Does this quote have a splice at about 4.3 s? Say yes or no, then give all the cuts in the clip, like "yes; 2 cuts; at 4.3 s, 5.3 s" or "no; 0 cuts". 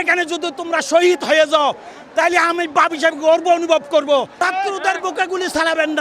yes; 1 cut; at 4.3 s